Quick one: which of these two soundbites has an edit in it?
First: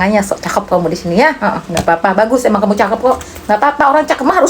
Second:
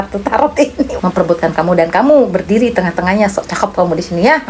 second; 1 cut; at 0.9 s

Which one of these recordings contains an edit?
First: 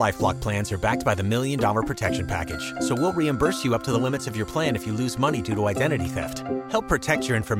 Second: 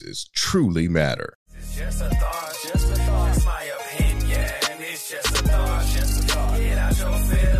second; 1 cut; at 1.4 s

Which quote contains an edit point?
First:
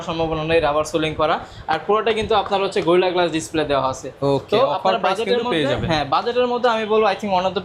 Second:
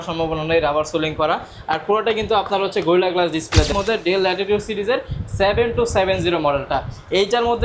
second; 1 cut; at 3.7 s

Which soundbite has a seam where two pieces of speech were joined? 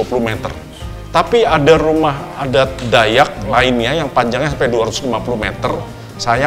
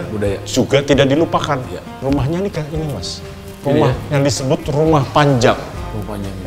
second; 1 cut; at 1.8 s

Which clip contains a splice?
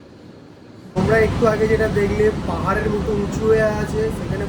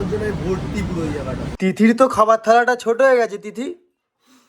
second; 1 cut; at 1.5 s

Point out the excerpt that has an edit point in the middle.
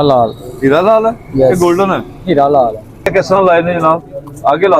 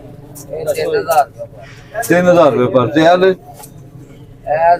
first; 1 cut; at 3.1 s

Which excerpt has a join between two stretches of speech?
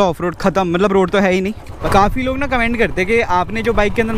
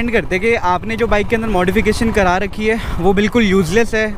first; 1 cut; at 1.7 s

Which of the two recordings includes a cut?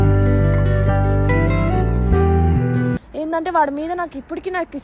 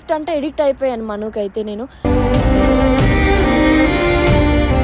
first; 1 cut; at 3.1 s

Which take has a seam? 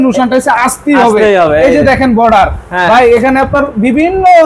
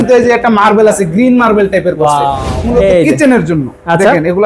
second; 1 cut; at 2.5 s

